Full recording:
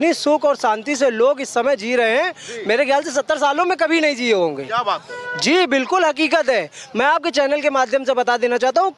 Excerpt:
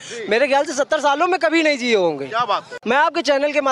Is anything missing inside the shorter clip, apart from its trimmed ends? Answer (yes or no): yes